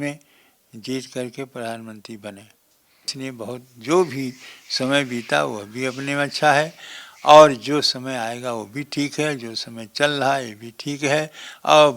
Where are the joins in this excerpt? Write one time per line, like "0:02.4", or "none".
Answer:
0:03.1